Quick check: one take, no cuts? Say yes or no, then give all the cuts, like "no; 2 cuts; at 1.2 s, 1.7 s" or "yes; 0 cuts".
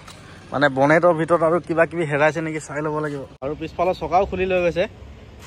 no; 1 cut; at 3.3 s